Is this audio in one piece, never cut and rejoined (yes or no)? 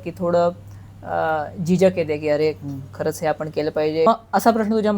no